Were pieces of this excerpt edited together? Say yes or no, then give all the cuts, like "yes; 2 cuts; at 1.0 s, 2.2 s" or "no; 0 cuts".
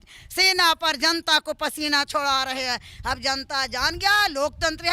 no; 0 cuts